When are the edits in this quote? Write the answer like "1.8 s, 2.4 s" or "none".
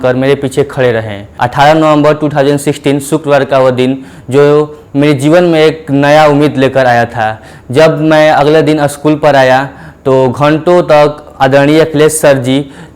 1.2 s